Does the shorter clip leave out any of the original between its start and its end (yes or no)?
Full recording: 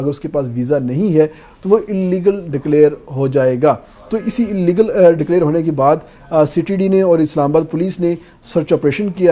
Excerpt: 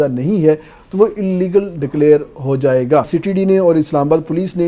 yes